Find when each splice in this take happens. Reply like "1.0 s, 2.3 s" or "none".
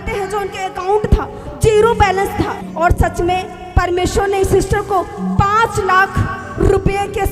2.6 s